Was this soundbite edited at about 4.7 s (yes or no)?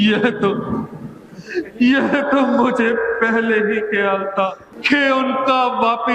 yes